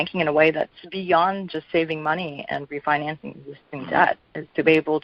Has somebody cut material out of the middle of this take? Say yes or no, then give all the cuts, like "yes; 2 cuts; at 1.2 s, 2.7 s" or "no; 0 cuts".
yes; 1 cut; at 0.9 s